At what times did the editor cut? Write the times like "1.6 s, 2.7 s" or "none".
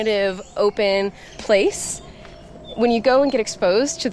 1.3 s